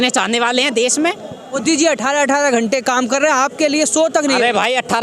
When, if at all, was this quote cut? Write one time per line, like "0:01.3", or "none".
0:01.5